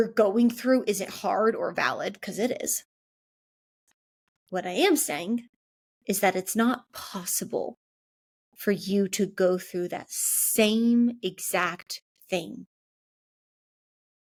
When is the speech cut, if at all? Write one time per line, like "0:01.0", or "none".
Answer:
none